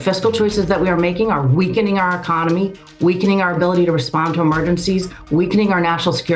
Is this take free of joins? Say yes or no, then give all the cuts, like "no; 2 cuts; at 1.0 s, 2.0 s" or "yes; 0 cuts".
yes; 0 cuts